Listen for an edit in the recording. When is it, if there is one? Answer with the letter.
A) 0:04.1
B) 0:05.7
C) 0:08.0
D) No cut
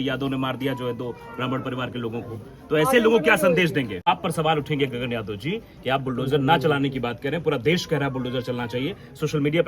A